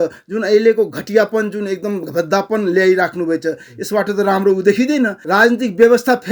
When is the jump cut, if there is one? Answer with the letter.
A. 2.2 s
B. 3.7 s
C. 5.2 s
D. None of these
C